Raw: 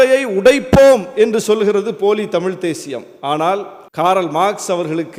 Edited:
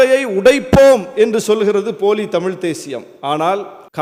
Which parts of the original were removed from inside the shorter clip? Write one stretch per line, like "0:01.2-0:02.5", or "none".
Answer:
none